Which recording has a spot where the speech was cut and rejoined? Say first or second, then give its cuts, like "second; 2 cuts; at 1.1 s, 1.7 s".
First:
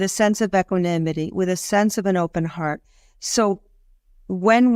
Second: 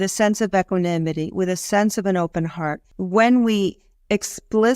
second; 1 cut; at 2.9 s